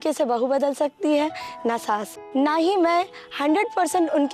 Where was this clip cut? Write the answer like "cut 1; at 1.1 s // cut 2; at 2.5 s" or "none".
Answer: cut 1; at 2.2 s